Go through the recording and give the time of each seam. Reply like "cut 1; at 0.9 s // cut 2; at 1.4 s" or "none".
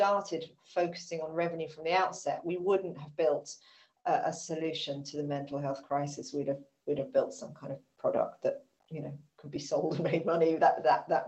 none